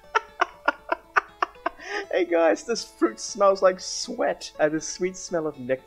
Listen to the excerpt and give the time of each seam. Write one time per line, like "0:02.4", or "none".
0:04.5